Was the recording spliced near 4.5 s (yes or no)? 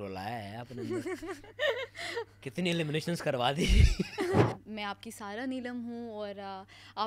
yes